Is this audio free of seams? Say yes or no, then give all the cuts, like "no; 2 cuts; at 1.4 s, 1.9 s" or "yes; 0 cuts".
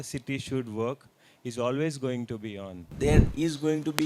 no; 1 cut; at 2.9 s